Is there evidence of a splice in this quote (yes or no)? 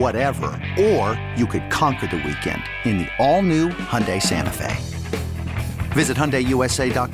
no